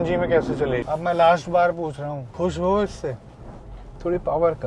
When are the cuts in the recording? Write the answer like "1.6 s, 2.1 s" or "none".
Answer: 0.8 s, 2.2 s